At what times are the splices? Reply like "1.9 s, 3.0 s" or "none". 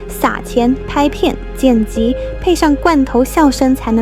none